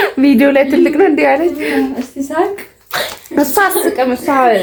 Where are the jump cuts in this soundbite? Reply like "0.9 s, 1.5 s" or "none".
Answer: none